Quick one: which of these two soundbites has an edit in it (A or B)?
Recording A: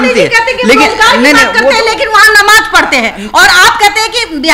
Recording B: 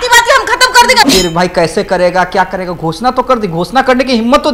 B